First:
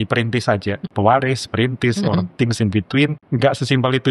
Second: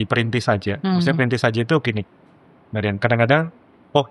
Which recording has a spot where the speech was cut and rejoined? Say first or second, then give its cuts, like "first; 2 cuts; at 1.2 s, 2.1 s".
first; 2 cuts; at 0.8 s, 3.2 s